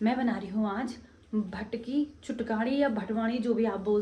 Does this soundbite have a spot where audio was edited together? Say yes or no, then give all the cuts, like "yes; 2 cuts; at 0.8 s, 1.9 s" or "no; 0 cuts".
no; 0 cuts